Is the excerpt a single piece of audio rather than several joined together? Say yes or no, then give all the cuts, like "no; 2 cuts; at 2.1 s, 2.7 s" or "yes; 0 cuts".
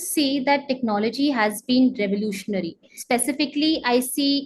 no; 1 cut; at 2.9 s